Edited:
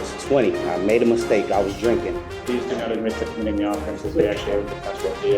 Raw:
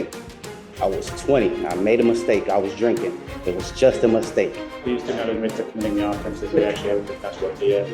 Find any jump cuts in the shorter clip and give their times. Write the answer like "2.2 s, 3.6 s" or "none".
2.3 s